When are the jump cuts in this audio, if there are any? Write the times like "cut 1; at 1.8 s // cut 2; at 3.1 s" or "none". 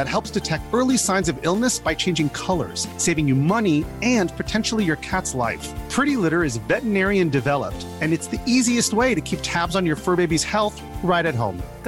none